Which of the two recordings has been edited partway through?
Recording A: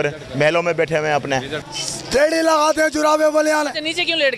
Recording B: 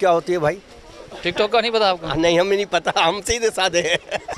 A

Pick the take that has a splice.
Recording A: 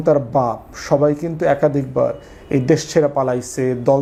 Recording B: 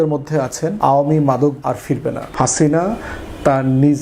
B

